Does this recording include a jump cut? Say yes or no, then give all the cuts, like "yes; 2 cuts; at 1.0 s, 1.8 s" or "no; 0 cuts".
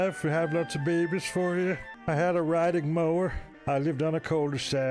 yes; 2 cuts; at 1.9 s, 3.5 s